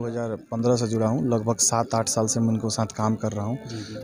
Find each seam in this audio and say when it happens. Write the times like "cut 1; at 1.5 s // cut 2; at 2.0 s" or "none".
none